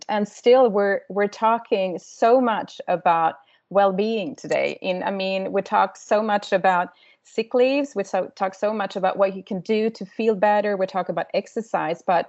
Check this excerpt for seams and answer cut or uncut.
uncut